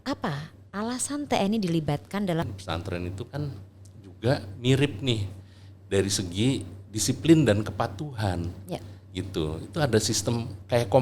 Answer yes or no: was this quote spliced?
yes